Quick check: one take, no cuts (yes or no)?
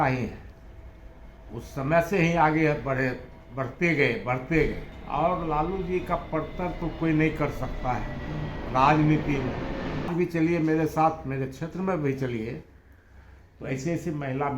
no